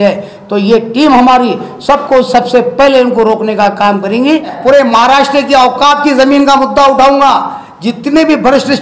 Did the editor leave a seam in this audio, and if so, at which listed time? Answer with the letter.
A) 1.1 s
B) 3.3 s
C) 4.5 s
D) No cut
C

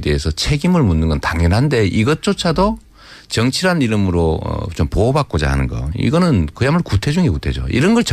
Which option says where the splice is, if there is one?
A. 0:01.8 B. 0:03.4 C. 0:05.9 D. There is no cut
C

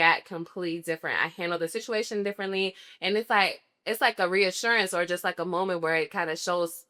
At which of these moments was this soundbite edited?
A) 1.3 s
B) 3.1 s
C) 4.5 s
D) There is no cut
D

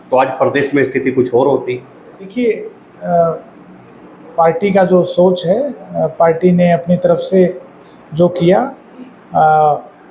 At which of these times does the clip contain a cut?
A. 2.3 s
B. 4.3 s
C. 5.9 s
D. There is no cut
A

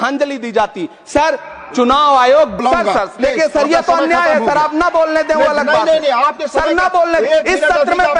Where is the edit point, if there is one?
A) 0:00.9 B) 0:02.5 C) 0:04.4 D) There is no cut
B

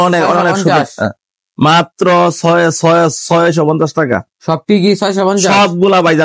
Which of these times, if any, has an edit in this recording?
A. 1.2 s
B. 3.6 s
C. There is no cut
C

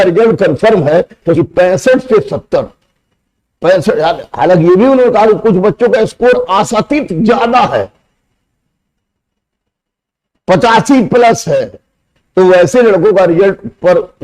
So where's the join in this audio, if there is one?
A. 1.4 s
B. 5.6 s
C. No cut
A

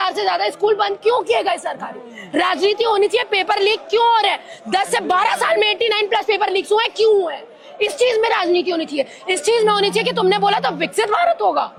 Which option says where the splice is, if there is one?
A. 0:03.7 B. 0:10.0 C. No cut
C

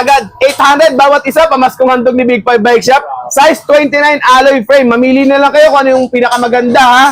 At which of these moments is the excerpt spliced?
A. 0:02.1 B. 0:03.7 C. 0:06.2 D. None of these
D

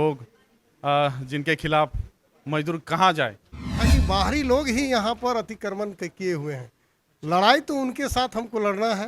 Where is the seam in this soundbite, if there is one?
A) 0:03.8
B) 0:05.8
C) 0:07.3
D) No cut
A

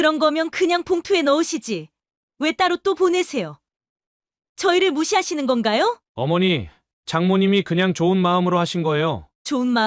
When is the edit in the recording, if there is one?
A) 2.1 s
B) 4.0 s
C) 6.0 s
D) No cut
C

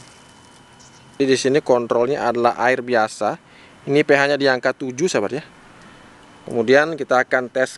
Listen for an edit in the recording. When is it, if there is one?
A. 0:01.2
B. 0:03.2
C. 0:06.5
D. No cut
A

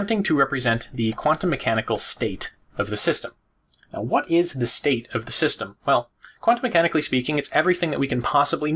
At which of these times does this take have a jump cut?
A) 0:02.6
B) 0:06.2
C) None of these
B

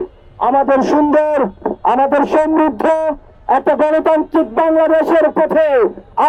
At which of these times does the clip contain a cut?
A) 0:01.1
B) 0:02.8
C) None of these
C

